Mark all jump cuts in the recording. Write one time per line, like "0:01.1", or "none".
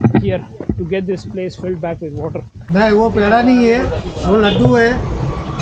0:02.6